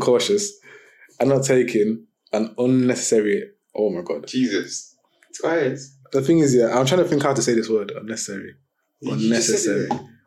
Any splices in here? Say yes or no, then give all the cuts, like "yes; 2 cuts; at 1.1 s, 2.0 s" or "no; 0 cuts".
no; 0 cuts